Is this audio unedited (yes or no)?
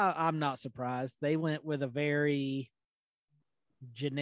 yes